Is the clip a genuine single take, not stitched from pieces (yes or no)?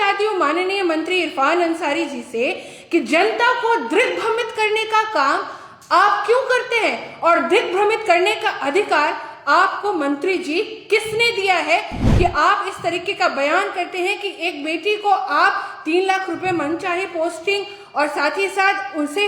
yes